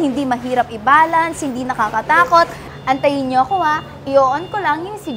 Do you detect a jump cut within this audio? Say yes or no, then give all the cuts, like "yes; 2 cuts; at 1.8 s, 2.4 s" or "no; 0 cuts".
yes; 1 cut; at 2.7 s